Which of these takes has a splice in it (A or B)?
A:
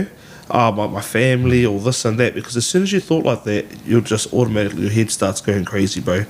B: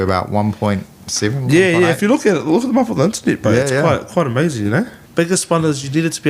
B